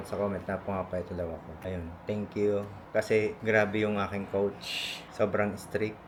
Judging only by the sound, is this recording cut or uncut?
uncut